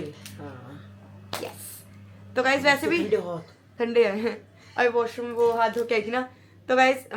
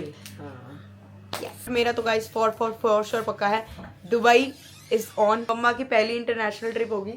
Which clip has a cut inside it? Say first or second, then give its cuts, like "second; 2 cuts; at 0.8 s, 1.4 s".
second; 2 cuts; at 1.7 s, 5.4 s